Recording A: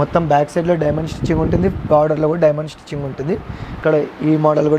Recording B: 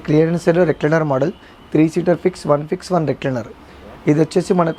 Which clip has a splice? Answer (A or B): A